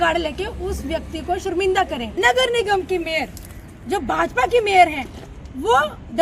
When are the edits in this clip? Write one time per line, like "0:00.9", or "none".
0:02.0